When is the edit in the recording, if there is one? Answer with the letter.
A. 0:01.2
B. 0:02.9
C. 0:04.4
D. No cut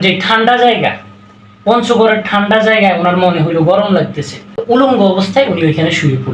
C